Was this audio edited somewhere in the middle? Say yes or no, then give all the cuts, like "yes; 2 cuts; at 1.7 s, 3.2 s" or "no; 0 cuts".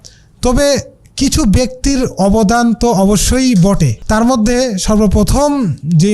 yes; 1 cut; at 3.9 s